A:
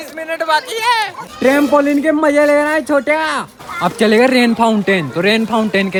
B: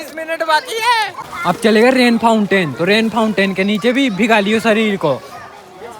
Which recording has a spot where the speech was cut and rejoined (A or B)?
B